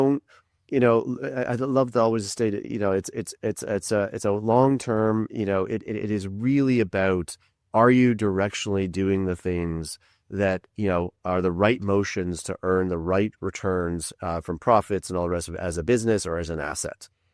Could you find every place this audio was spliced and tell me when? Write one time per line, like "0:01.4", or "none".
none